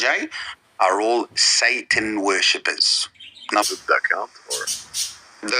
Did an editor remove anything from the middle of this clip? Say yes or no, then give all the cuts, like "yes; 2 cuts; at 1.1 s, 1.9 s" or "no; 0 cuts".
yes; 1 cut; at 3.7 s